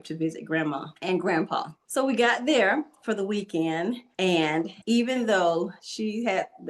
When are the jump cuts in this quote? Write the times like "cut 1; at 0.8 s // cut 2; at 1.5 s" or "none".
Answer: cut 1; at 1.8 s // cut 2; at 4.4 s // cut 3; at 5.8 s